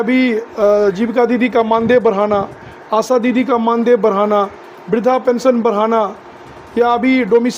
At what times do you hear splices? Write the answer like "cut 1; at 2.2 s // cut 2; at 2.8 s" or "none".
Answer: none